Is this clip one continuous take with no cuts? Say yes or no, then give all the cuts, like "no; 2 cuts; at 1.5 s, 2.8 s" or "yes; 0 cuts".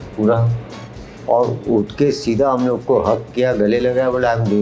yes; 0 cuts